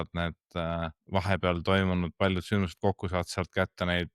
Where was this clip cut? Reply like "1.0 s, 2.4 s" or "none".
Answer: 1.0 s